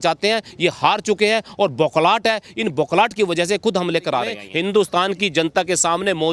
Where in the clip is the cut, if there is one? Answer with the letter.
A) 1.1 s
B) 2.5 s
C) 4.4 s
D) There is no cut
C